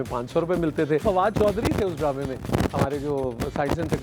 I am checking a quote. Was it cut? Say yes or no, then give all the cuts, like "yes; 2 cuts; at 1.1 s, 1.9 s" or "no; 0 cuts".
yes; 1 cut; at 1.0 s